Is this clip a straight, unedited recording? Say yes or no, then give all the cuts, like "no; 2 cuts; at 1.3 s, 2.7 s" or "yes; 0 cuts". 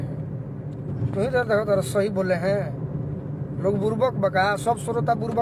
yes; 0 cuts